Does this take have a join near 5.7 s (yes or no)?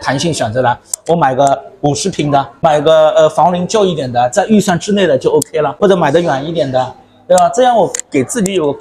yes